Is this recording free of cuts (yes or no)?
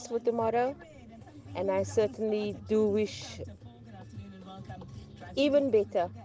yes